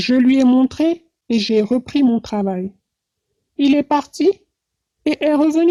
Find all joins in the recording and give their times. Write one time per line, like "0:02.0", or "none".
none